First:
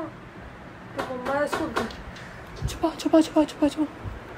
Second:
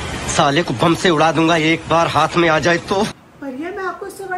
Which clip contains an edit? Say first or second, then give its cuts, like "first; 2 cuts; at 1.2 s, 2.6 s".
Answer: second; 1 cut; at 3.2 s